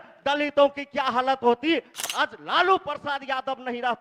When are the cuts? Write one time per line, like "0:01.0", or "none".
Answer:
0:02.0